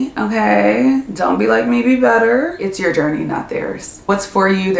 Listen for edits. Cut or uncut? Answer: cut